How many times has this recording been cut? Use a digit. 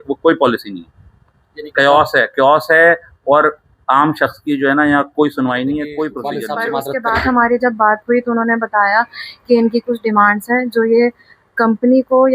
1